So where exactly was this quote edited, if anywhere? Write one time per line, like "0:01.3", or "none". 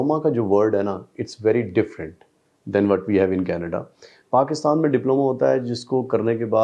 none